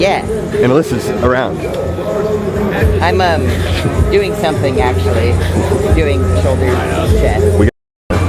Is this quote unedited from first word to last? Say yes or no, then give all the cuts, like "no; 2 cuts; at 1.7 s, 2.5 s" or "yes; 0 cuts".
yes; 0 cuts